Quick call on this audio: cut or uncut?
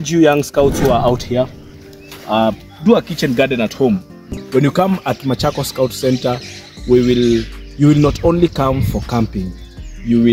cut